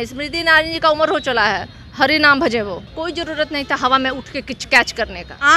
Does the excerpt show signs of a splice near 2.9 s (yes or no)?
yes